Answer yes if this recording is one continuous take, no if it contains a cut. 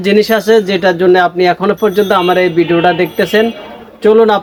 yes